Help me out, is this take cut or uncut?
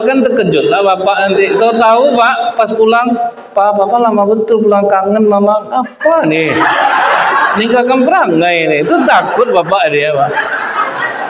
uncut